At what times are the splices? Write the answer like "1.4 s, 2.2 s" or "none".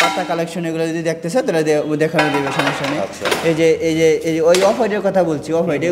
none